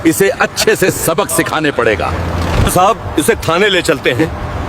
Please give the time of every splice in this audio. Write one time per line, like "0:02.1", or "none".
0:02.7